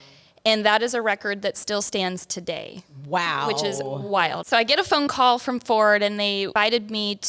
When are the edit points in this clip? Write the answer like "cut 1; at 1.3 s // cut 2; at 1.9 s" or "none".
cut 1; at 4.4 s // cut 2; at 6.5 s

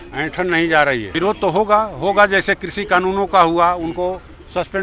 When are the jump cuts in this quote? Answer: cut 1; at 1.1 s

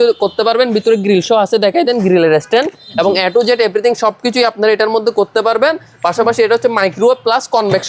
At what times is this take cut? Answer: none

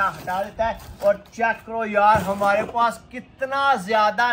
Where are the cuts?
none

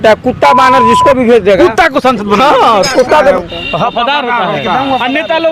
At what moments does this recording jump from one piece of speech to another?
cut 1; at 3.2 s

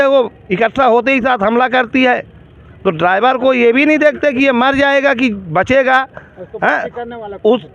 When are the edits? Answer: none

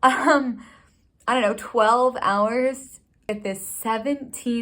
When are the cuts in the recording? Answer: cut 1; at 3.3 s

